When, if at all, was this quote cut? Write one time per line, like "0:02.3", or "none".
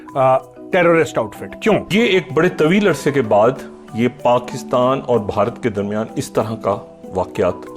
0:01.4